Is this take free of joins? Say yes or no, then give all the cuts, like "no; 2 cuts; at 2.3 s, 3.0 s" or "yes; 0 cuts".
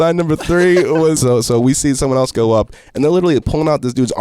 no; 1 cut; at 1.2 s